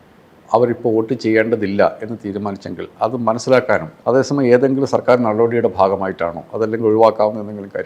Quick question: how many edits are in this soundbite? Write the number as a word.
one